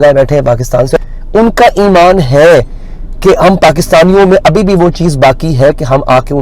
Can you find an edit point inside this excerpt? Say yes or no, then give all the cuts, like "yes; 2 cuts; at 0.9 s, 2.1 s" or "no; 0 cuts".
yes; 1 cut; at 1.0 s